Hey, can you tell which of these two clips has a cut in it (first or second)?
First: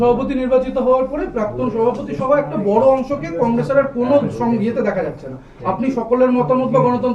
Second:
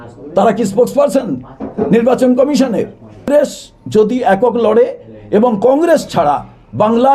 second